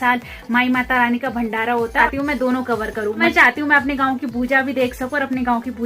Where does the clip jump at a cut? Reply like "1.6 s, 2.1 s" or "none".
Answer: 2.1 s

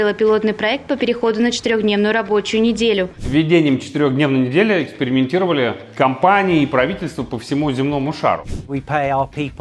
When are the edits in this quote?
3.2 s, 5.8 s, 8.6 s

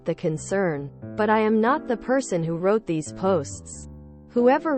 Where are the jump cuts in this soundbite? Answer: 1.1 s

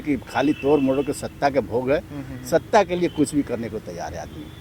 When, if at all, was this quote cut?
none

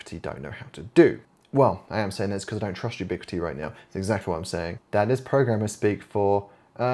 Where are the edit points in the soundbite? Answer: 1.3 s, 4.8 s

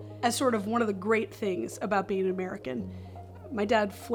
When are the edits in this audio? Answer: none

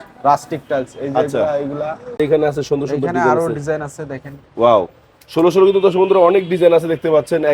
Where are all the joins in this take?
2.2 s

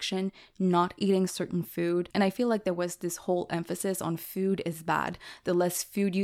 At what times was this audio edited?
2.1 s

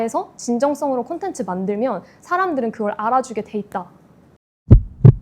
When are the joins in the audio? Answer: 4.3 s

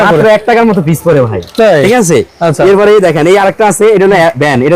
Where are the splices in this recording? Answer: none

